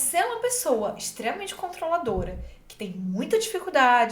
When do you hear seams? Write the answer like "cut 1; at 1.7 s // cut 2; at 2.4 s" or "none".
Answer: none